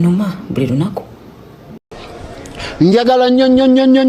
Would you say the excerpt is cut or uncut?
cut